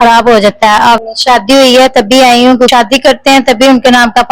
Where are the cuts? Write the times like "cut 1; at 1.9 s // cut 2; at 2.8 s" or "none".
cut 1; at 1.0 s // cut 2; at 2.7 s